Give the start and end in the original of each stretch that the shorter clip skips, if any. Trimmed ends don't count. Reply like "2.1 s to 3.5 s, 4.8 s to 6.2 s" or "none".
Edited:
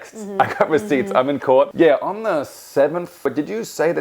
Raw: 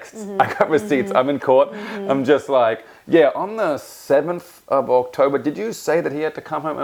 1.7 s to 3.0 s, 4.6 s to 5.3 s